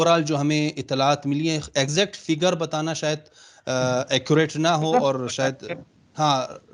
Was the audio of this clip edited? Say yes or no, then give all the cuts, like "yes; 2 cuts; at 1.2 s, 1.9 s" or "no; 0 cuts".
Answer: no; 0 cuts